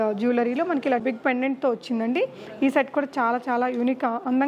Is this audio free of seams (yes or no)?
no